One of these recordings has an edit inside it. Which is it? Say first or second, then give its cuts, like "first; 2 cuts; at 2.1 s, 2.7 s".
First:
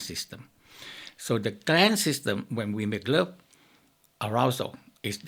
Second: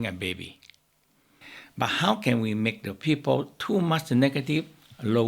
second; 1 cut; at 1.5 s